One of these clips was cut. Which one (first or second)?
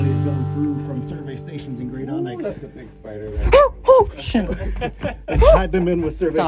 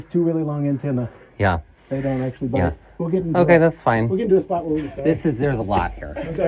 second